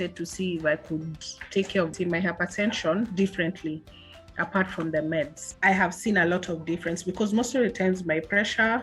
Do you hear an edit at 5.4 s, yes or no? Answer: yes